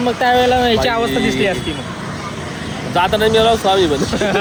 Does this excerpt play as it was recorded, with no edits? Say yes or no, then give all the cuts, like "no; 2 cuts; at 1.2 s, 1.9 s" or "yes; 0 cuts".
yes; 0 cuts